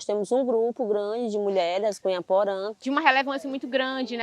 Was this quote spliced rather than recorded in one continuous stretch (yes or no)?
yes